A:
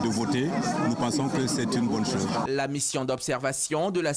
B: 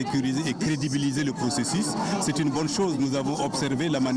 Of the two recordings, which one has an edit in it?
A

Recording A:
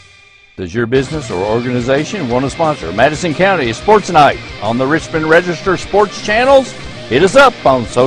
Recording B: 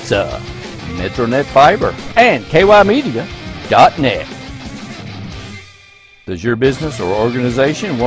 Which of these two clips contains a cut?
B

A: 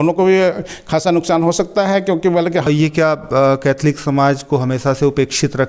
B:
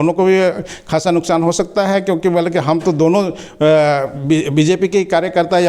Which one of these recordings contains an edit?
A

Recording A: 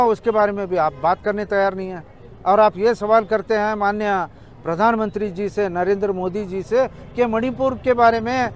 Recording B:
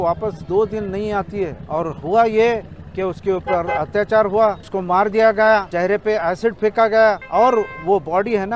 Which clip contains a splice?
B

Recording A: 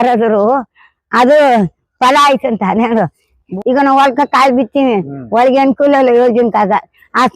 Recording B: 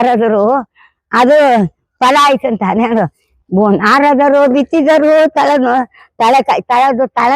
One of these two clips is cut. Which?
A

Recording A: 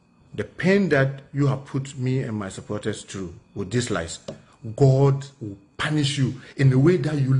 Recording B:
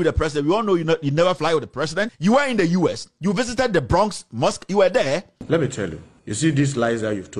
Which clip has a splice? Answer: B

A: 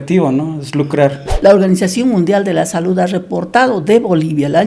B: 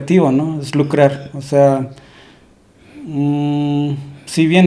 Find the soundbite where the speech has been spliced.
A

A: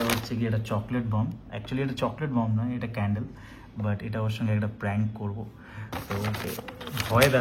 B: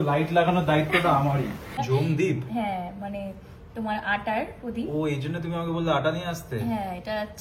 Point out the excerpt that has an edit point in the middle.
B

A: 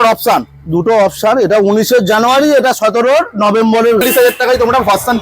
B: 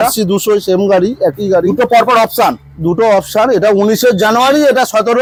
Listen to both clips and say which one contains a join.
A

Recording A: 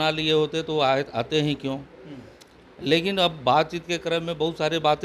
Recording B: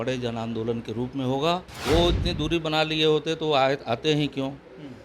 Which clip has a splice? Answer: B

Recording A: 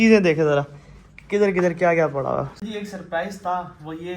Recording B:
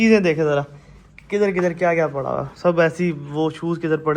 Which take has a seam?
A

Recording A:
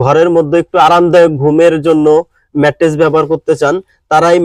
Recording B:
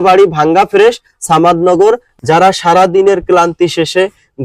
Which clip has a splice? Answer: B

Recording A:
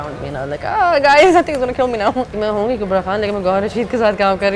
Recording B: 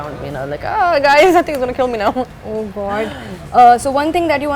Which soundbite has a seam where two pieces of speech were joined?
A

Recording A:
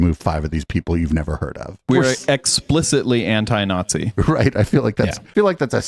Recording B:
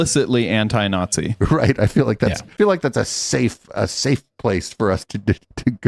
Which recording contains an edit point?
A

